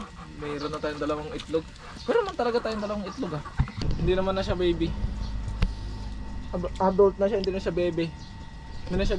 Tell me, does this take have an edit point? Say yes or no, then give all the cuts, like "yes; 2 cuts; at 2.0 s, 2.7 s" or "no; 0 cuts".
yes; 1 cut; at 3.8 s